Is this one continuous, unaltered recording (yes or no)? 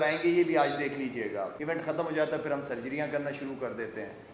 no